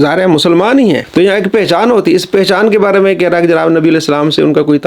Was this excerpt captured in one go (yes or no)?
no